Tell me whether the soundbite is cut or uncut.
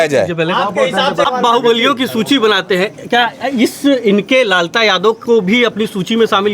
cut